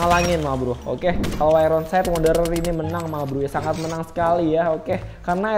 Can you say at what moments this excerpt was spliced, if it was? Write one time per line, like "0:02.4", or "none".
0:01.3